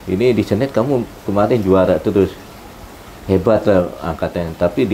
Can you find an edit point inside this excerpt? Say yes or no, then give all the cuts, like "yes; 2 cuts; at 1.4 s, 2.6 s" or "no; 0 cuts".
no; 0 cuts